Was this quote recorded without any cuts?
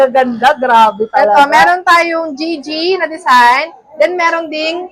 yes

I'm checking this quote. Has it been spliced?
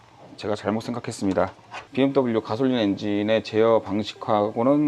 yes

